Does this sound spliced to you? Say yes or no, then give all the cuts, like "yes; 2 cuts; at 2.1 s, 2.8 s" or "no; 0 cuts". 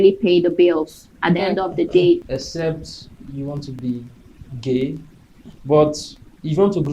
yes; 3 cuts; at 2.2 s, 3.7 s, 5.5 s